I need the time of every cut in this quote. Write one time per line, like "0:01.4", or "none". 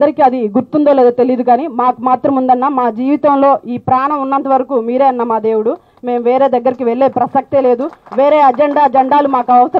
none